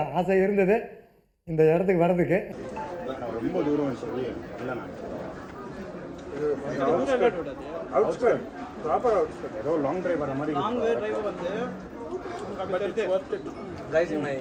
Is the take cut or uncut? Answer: uncut